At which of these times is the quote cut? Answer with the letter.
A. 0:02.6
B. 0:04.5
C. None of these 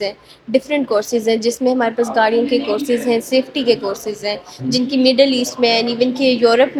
C